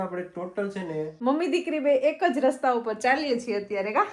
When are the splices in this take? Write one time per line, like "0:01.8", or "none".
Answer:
0:01.1

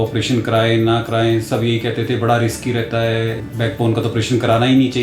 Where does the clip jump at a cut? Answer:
0:03.4

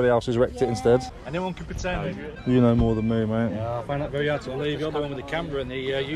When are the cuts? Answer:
0:01.2
0:02.4

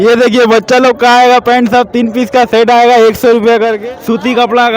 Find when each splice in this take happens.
0:03.8

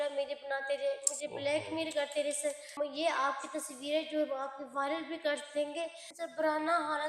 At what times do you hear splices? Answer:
0:02.8
0:06.1

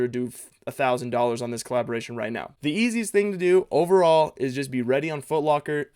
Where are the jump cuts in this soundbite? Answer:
0:02.5

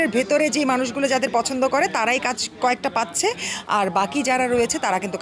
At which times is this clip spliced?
none

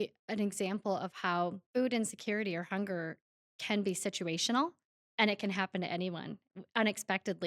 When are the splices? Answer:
0:01.6

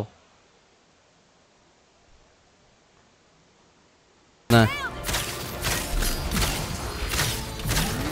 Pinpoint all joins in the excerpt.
0:04.5

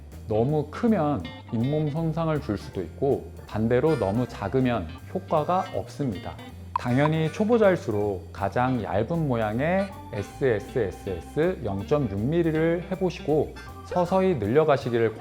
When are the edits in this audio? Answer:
0:03.4
0:06.8

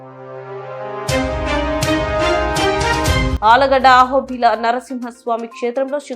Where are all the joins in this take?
0:03.3

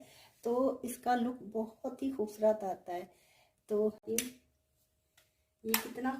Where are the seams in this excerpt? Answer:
0:04.0

